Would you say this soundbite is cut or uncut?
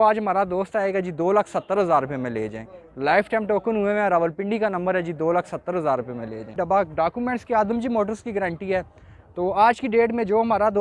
cut